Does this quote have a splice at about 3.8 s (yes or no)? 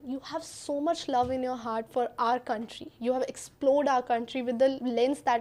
no